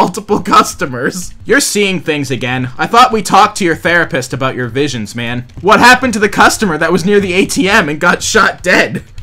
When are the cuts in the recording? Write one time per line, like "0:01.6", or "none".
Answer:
0:05.5